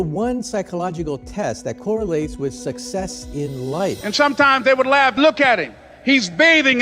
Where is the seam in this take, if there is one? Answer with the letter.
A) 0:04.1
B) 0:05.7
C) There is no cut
A